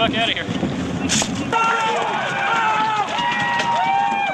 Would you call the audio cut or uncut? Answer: cut